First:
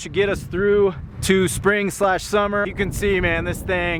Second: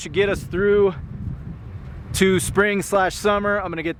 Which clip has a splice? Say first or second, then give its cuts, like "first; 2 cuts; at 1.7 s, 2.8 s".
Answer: first; 2 cuts; at 1.1 s, 2.7 s